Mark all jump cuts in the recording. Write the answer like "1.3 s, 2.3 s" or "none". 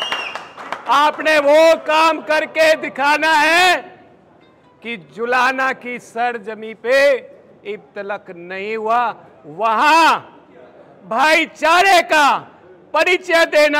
none